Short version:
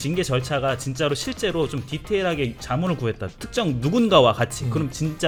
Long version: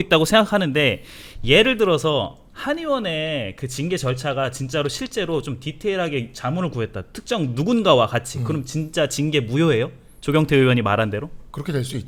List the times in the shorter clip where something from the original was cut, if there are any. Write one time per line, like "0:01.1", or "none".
none

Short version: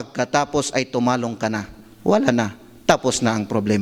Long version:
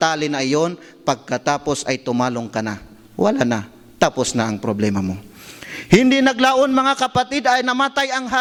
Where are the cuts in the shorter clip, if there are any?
none

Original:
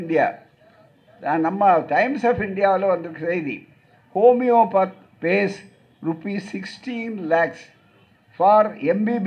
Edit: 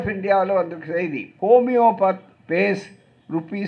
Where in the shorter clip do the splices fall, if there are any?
0:01.2

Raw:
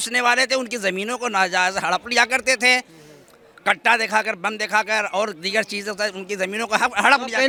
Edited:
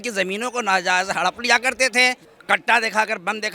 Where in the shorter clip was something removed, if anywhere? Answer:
0:02.3

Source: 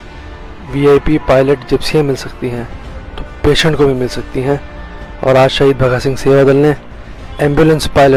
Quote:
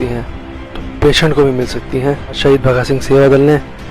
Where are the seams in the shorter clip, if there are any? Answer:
0:02.4

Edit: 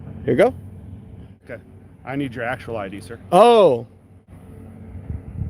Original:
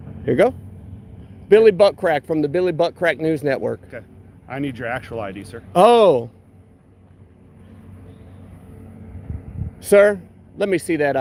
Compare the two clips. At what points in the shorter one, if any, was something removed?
0:01.4
0:04.3

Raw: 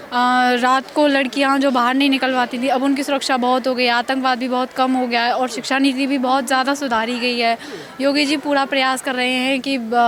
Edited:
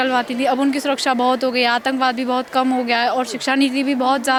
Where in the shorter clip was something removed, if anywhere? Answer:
none

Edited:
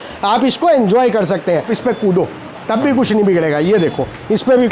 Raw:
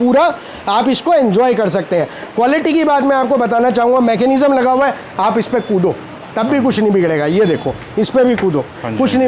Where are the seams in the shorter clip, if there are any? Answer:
0:01.7

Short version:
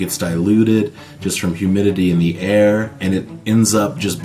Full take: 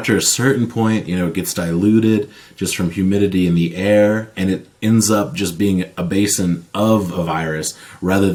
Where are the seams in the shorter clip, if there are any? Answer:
none

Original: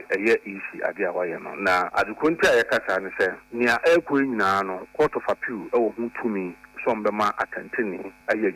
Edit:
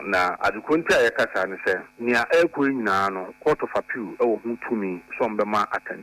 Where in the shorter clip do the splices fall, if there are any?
0:05.0

